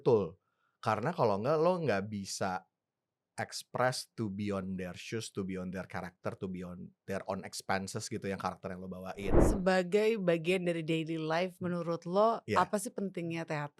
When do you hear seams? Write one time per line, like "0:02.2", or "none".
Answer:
0:09.4